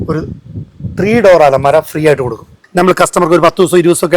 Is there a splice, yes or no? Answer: yes